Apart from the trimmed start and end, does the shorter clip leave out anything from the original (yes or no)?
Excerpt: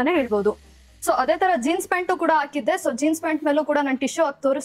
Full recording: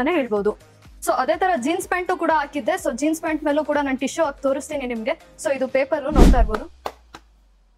no